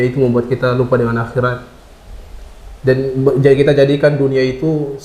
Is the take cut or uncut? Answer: uncut